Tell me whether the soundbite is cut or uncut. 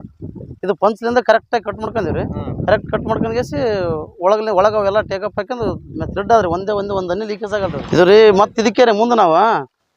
cut